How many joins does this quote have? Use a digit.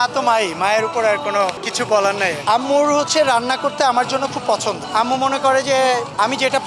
0